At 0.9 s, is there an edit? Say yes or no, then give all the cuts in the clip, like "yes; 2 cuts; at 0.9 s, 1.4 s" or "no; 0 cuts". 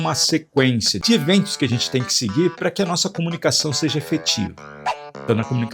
yes; 1 cut; at 0.9 s